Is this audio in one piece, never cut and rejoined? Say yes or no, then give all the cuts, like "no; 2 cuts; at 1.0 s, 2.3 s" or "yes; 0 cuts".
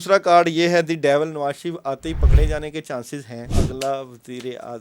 no; 1 cut; at 3.6 s